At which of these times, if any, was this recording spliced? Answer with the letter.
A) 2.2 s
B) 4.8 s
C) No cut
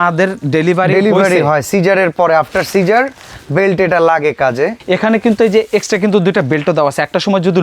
B